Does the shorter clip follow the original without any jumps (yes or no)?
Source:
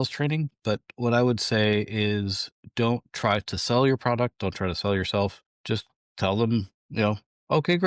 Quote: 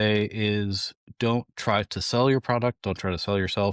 yes